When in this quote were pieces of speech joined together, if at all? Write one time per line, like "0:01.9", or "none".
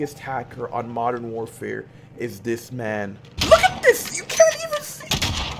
0:03.2